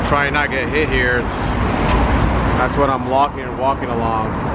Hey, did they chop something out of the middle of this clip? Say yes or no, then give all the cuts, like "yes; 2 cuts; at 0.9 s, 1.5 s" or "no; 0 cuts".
no; 0 cuts